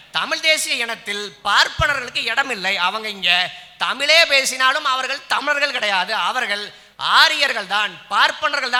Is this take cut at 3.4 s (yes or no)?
no